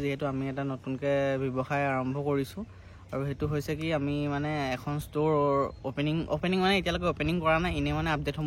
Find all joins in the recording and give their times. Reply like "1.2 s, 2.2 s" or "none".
none